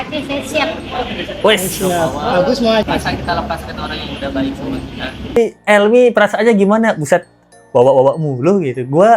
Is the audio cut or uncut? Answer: cut